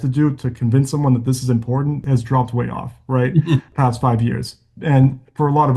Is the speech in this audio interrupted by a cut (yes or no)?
yes